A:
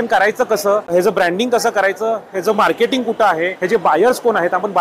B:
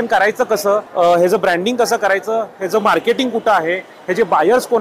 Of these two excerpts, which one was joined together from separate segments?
A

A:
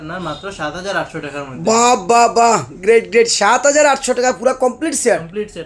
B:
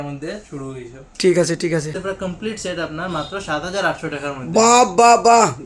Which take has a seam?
B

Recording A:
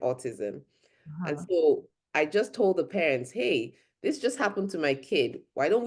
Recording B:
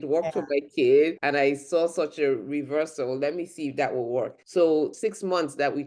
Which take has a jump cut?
B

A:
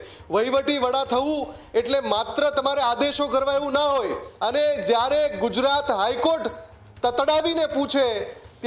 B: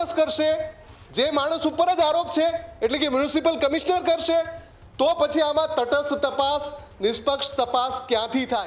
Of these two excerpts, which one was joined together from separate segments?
A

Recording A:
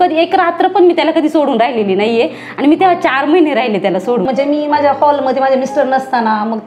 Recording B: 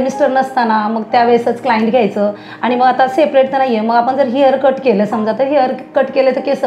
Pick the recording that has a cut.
A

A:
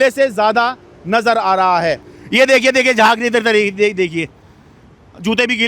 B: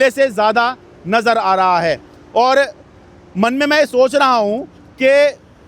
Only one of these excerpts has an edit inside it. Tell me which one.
A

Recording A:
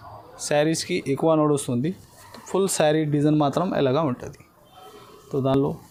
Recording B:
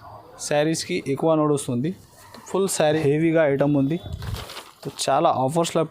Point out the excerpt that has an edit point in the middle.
B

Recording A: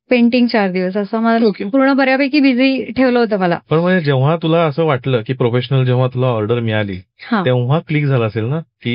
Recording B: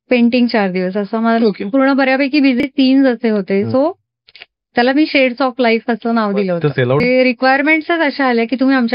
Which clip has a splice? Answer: B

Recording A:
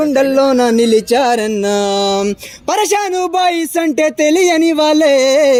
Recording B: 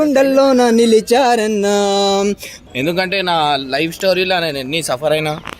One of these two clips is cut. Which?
B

